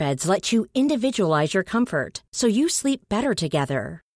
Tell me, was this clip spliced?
no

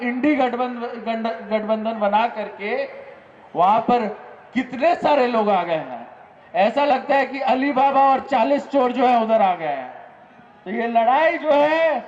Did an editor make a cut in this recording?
no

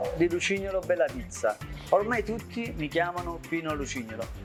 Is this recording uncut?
yes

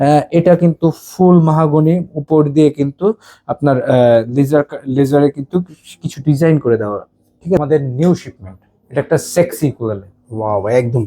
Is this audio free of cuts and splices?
no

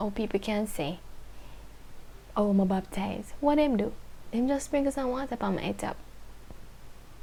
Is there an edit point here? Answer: no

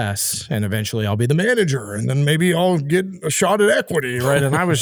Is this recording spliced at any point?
no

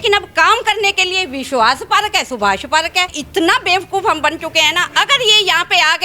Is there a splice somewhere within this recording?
yes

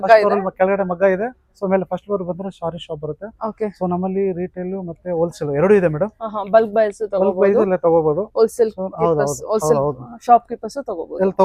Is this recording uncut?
yes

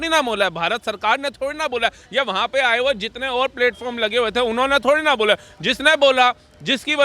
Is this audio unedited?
yes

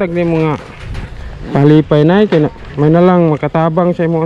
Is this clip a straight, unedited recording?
yes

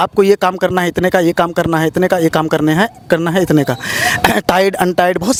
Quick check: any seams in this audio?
no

